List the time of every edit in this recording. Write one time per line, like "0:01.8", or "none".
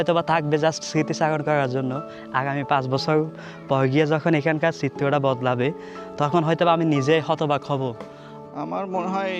0:08.4